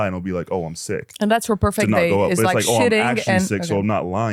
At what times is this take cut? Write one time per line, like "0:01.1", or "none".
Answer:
none